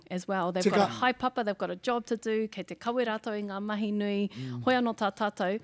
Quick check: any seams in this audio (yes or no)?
no